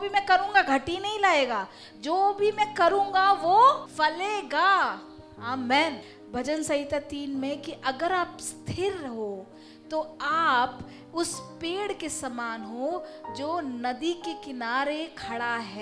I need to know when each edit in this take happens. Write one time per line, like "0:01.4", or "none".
0:03.9
0:06.1